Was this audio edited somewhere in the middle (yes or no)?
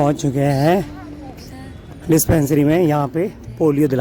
no